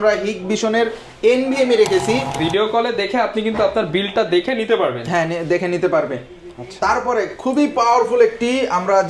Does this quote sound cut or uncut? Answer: cut